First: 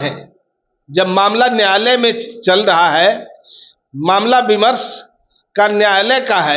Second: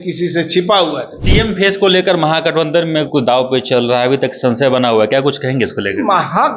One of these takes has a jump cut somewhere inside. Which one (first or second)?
second